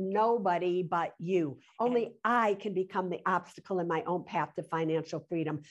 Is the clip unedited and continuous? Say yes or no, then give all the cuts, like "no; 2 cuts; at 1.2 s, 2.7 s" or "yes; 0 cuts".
no; 1 cut; at 1.6 s